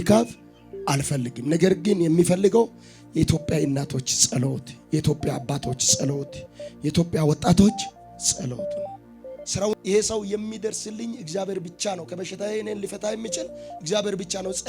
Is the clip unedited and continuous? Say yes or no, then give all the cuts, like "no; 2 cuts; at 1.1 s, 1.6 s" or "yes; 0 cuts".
no; 1 cut; at 9.8 s